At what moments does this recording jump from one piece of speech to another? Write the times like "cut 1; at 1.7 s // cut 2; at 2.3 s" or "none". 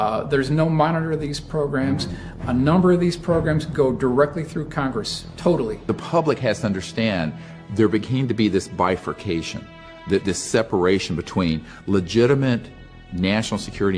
cut 1; at 5.9 s